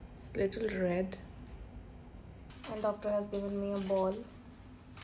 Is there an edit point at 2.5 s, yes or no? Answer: yes